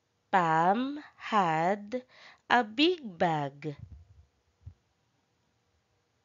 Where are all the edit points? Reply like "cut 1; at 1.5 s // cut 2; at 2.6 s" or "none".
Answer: none